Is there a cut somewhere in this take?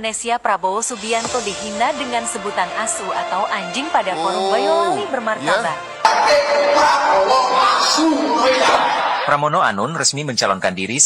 yes; 1 cut; at 9.1 s

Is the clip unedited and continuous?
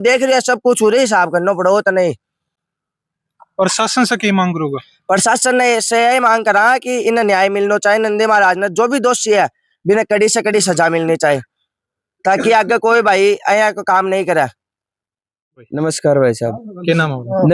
yes; 0 cuts

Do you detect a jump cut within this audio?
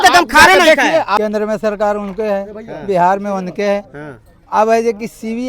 yes; 1 cut; at 1.2 s

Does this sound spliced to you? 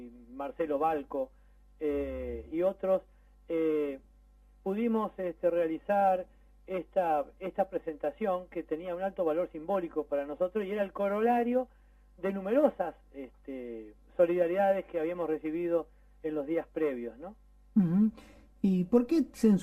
no; 0 cuts

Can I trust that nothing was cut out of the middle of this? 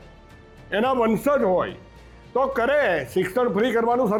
yes; 0 cuts

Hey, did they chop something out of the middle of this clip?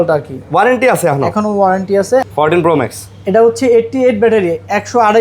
yes; 1 cut; at 2.2 s

